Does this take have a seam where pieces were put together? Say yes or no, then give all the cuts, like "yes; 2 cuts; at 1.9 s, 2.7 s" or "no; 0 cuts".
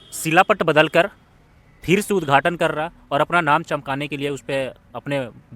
no; 0 cuts